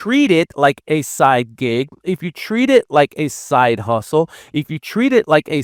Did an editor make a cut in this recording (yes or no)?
no